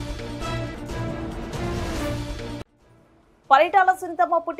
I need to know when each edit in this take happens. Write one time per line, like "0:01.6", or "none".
none